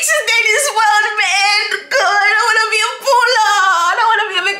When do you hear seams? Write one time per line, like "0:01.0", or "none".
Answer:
none